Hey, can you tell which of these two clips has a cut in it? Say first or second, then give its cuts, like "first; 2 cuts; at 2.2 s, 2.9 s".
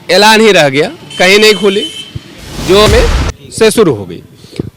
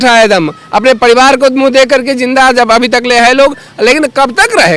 first; 1 cut; at 2.9 s